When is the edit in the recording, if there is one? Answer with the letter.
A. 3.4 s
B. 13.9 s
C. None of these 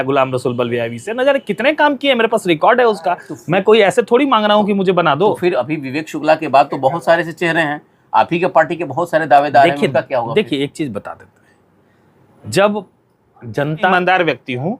B